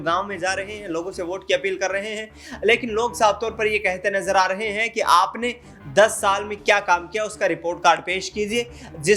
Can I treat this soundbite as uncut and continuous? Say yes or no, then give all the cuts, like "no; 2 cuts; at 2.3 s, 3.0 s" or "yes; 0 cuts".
yes; 0 cuts